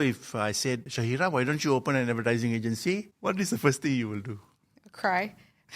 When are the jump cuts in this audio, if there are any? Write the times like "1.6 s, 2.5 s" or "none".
0.9 s, 3.1 s